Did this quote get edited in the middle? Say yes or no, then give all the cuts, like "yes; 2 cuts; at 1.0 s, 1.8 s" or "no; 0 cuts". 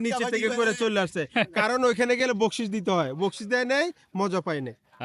no; 0 cuts